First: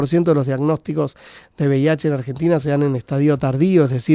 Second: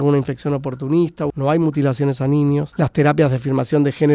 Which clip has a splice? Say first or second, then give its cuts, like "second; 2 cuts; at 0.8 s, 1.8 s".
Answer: second; 2 cuts; at 1.3 s, 2.7 s